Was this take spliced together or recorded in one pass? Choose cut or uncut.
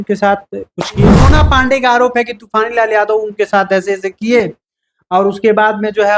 cut